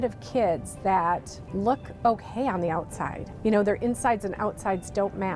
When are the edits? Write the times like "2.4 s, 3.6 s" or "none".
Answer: 1.4 s, 3.2 s